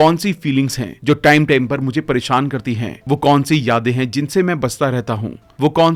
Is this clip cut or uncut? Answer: uncut